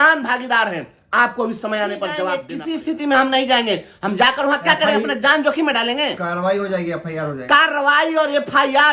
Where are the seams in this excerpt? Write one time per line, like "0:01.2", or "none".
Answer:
0:02.5